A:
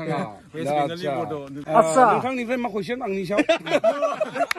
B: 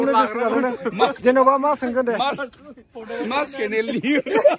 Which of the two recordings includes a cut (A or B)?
A